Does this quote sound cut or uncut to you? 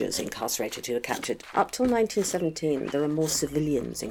cut